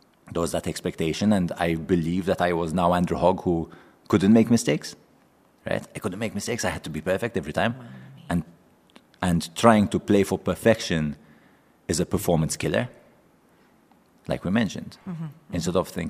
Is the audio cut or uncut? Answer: uncut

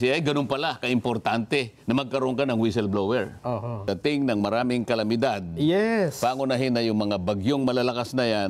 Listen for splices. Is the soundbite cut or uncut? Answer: cut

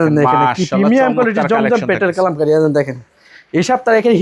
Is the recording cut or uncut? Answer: uncut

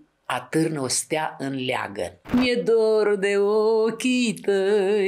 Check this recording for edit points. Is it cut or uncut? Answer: cut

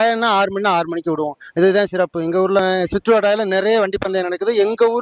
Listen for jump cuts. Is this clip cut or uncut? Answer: cut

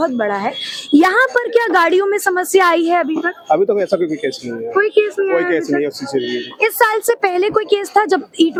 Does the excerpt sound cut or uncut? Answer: uncut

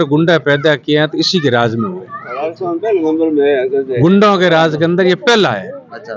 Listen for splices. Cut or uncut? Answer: uncut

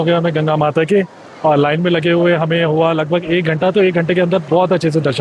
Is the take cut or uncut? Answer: uncut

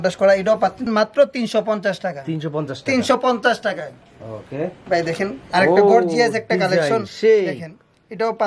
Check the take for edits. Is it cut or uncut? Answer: uncut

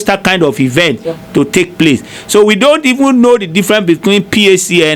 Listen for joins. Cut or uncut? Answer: uncut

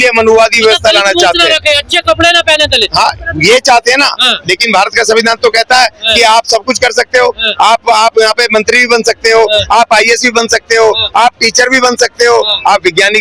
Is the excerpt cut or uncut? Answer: uncut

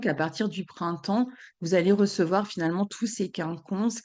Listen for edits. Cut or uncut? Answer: uncut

